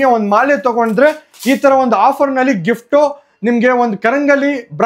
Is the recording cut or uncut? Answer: uncut